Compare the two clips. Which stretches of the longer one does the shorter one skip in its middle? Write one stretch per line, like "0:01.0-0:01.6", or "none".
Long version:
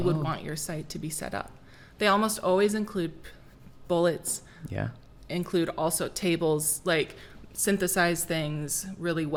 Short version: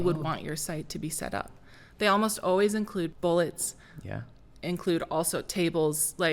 0:03.1-0:03.8